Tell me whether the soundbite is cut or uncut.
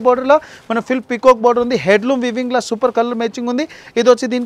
uncut